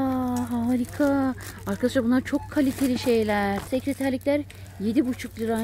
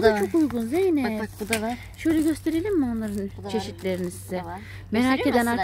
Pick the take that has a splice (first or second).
first